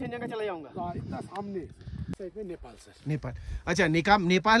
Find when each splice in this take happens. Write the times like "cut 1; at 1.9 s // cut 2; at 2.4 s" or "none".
cut 1; at 2.1 s